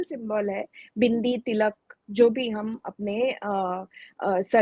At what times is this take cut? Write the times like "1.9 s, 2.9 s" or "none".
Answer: none